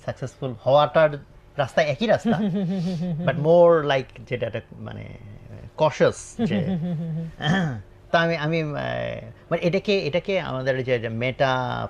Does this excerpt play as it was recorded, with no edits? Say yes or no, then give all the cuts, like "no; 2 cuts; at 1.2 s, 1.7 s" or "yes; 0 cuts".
yes; 0 cuts